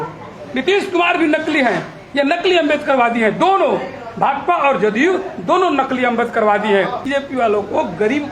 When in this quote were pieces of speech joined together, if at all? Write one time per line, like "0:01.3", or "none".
0:07.1